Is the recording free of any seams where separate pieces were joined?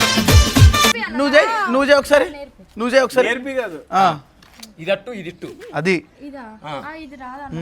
no; 1 cut; at 1.0 s

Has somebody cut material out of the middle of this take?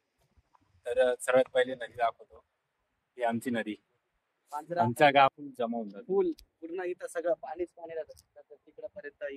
yes; 1 cut; at 5.3 s

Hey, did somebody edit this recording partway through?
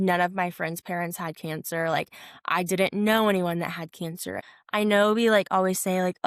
yes; 1 cut; at 4.3 s

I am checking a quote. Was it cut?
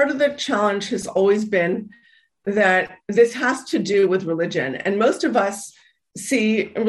no; 0 cuts

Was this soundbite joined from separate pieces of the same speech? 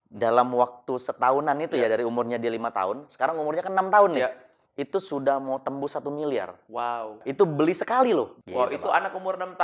yes; 2 cuts; at 7.2 s, 8.4 s

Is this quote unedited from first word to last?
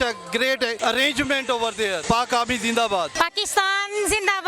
no; 3 cuts; at 0.8 s, 2.0 s, 3.1 s

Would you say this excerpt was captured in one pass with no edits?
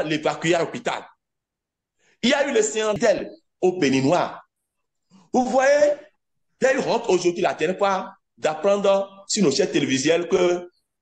no; 1 cut; at 3.0 s

